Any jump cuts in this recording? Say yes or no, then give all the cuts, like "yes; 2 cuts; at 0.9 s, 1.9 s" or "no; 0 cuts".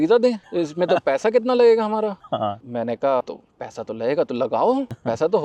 no; 0 cuts